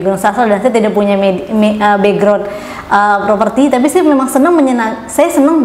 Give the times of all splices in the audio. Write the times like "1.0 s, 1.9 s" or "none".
none